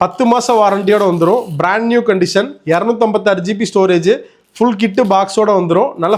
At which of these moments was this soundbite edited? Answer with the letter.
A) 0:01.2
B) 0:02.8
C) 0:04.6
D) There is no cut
D